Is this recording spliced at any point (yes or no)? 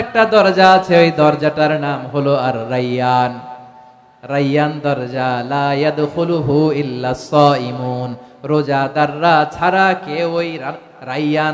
no